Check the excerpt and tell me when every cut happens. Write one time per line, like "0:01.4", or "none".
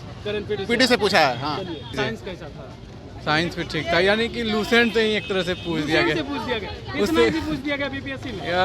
0:02.0